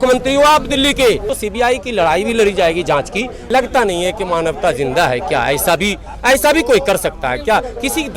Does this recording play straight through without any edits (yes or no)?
no